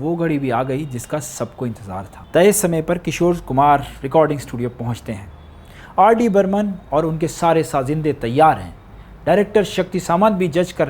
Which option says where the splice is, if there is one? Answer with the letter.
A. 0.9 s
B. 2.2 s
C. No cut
B